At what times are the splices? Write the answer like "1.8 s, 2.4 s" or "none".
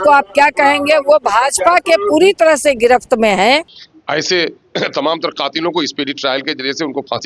3.6 s